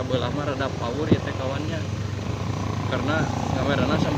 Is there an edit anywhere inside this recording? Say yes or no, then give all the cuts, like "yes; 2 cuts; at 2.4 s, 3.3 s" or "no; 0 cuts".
no; 0 cuts